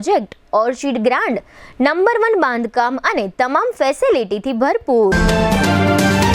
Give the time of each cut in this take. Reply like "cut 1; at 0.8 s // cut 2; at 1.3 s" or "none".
cut 1; at 5.1 s